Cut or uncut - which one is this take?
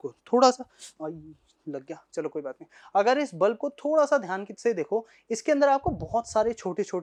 uncut